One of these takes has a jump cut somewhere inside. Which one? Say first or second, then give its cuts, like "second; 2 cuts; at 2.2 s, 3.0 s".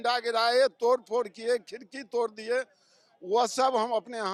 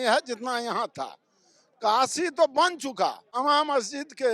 second; 1 cut; at 3.2 s